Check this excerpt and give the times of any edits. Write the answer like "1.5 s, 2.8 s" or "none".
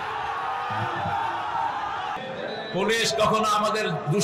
2.2 s